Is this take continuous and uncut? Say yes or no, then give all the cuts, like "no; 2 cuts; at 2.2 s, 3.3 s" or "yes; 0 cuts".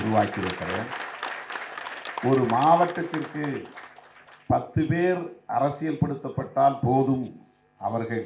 yes; 0 cuts